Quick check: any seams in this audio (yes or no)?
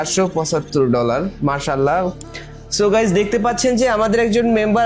yes